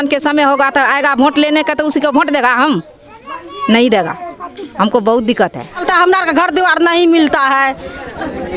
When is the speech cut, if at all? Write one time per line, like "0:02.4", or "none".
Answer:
0:05.8